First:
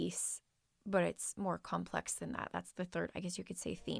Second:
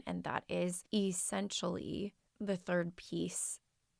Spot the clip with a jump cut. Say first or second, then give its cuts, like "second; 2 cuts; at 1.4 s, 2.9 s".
second; 2 cuts; at 0.8 s, 2.2 s